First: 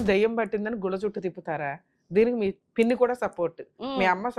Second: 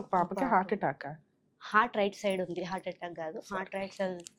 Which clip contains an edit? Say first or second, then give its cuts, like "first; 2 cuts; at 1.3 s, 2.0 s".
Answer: first; 1 cut; at 2.6 s